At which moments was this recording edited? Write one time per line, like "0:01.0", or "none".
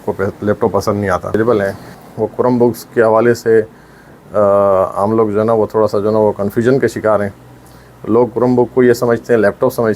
0:01.3